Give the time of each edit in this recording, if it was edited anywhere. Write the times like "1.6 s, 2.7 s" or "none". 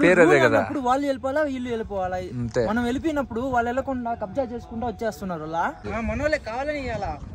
5.8 s